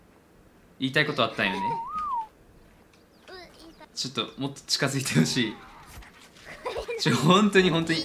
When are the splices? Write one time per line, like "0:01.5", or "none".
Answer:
none